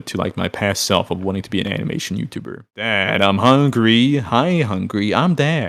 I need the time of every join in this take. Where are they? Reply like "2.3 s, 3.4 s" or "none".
2.9 s